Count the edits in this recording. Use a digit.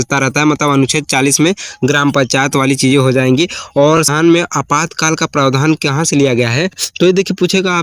1